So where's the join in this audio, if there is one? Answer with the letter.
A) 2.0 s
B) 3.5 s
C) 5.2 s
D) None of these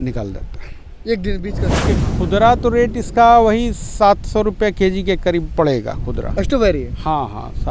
A